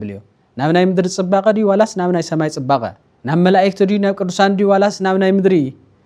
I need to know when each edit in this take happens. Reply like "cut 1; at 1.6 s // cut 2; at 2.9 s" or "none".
none